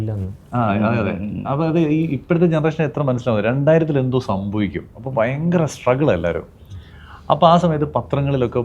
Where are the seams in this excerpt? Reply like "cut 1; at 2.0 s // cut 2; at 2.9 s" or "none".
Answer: none